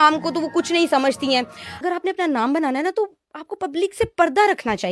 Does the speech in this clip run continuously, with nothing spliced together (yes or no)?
no